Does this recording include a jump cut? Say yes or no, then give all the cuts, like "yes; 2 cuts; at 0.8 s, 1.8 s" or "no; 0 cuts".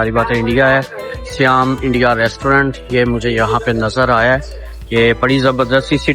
no; 0 cuts